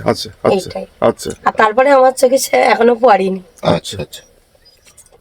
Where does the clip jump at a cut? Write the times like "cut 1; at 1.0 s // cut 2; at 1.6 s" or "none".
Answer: none